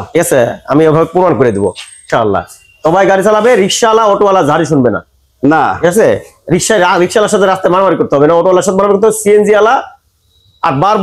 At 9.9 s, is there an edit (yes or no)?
no